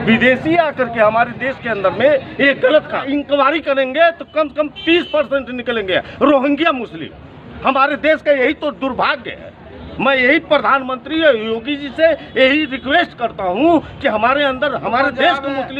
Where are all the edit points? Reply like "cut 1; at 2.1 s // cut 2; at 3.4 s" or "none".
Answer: cut 1; at 3.0 s